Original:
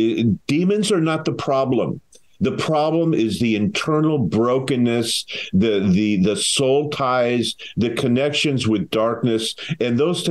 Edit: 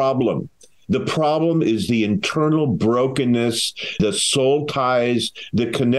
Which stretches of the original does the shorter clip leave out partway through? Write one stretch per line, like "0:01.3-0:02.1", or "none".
0:05.5-0:06.2